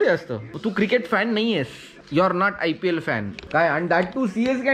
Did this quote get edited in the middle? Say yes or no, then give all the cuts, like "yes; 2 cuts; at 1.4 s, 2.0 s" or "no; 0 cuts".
yes; 1 cut; at 3.4 s